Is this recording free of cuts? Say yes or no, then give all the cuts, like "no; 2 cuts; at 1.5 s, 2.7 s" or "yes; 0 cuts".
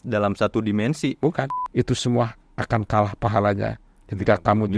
no; 1 cut; at 1.5 s